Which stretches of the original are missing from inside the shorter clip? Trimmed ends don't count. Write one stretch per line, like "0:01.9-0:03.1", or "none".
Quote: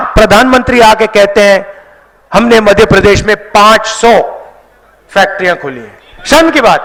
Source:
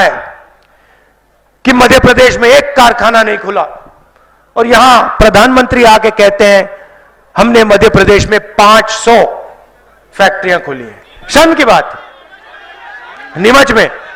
none